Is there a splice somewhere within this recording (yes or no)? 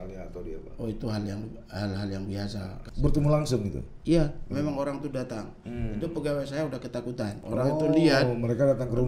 yes